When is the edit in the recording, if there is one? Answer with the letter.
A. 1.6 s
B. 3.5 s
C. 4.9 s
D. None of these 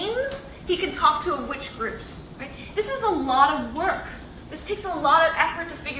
B